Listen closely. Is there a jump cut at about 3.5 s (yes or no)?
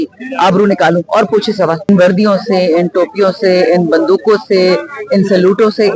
no